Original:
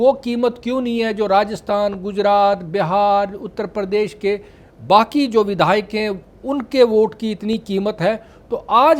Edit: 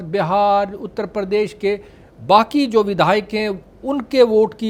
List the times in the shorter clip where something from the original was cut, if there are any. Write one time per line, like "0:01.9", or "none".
none